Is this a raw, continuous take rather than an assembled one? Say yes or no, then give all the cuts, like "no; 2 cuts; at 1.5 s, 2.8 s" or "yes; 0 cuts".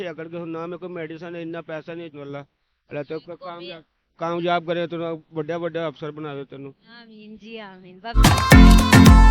no; 2 cuts; at 2.1 s, 8.1 s